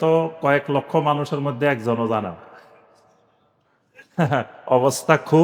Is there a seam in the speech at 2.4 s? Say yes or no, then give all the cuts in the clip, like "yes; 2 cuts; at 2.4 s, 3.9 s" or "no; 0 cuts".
no; 0 cuts